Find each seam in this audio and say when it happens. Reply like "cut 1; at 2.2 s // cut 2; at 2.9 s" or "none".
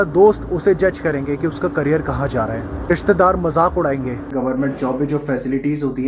cut 1; at 2.9 s // cut 2; at 4.3 s